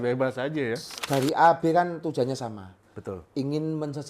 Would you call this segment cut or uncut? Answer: cut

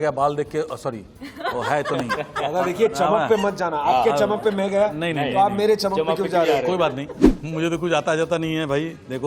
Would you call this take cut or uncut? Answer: cut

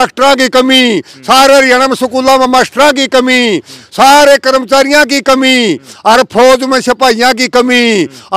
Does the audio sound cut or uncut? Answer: uncut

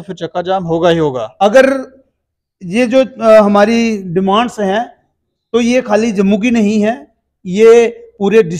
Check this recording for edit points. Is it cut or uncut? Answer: cut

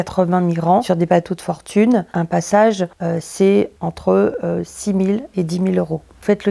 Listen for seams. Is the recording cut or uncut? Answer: cut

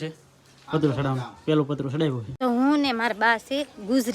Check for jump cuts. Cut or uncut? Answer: cut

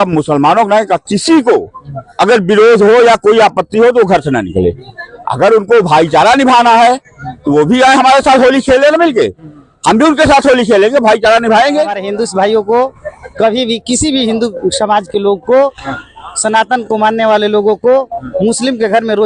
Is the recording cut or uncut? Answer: cut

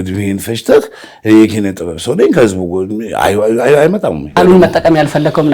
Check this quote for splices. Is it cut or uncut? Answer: cut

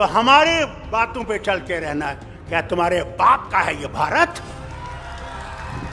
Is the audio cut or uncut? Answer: uncut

